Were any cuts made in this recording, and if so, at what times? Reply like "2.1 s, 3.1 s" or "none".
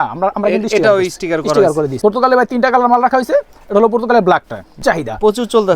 1.9 s, 4.8 s

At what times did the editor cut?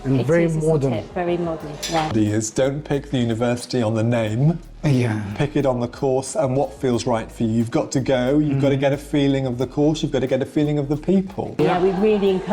2.1 s, 11.6 s

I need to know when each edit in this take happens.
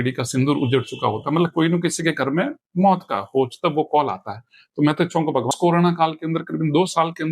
5.5 s

